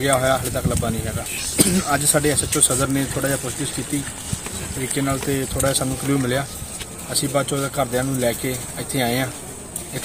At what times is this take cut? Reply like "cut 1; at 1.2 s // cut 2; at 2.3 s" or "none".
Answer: cut 1; at 1.2 s